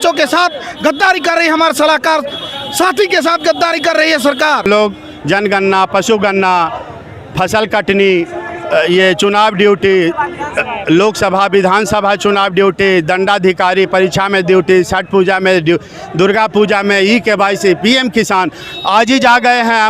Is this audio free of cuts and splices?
no; 1 cut; at 4.6 s

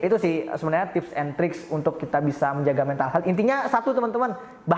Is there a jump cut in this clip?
no; 0 cuts

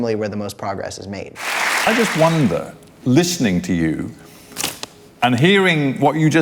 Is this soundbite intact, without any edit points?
no; 1 cut; at 1.5 s

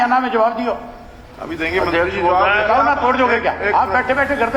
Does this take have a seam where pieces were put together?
no; 0 cuts

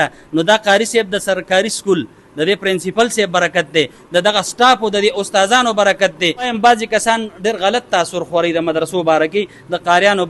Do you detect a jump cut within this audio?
yes; 1 cut; at 6.5 s

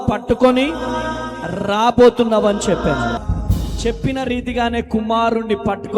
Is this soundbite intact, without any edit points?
no; 1 cut; at 3.2 s

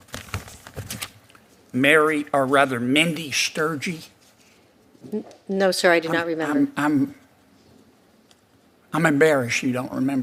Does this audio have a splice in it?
no; 0 cuts

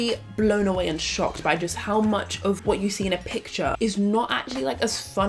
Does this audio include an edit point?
yes; 2 cuts; at 2.6 s, 3.8 s

